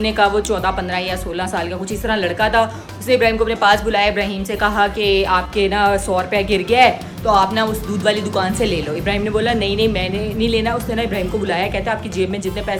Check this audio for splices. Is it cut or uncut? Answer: uncut